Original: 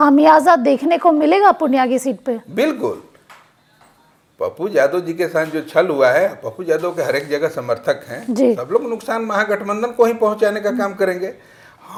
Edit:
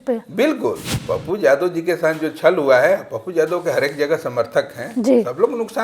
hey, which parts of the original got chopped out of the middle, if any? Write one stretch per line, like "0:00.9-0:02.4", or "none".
0:03.1-0:04.2